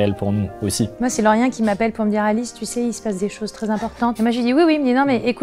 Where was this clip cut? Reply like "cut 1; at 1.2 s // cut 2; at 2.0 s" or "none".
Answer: cut 1; at 0.9 s